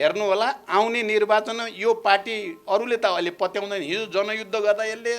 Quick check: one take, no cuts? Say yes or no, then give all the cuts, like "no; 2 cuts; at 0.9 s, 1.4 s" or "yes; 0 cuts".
yes; 0 cuts